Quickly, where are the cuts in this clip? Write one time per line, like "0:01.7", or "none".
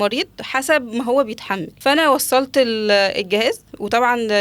0:01.7